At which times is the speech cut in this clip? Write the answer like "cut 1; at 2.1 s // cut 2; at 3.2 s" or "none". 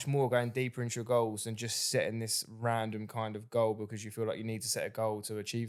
none